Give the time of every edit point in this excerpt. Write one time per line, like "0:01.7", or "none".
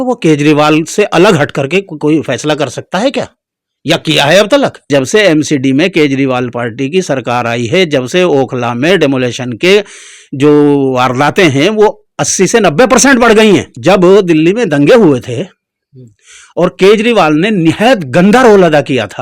0:04.9
0:13.7